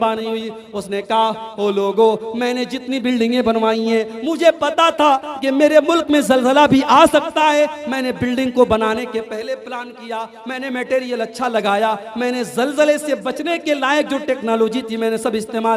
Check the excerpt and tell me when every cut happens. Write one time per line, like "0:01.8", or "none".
none